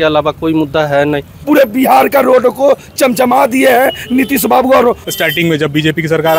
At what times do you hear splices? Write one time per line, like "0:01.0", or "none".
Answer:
0:01.4
0:05.0